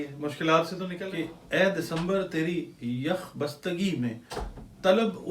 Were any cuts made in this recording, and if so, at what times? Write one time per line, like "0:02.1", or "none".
0:00.9